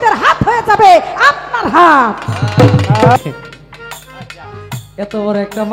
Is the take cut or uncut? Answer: cut